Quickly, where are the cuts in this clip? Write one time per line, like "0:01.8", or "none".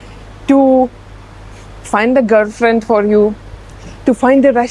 none